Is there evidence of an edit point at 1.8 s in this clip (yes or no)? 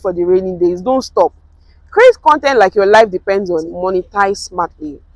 no